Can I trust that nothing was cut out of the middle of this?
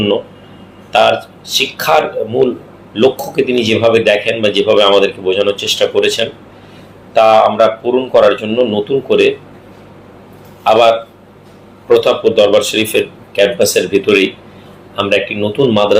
yes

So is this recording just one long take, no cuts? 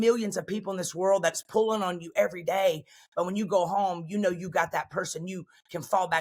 yes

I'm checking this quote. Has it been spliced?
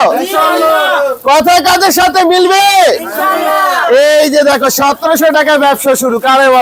no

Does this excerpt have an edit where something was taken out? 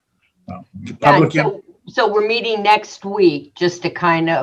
yes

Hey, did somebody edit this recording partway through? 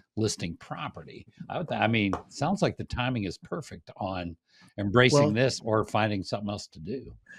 no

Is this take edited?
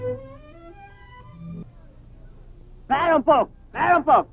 yes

